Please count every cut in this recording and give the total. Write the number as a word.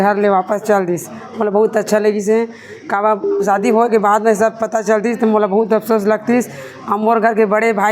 zero